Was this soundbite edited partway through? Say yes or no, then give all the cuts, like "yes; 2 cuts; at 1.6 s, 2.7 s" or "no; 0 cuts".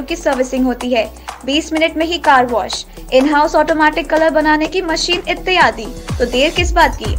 no; 0 cuts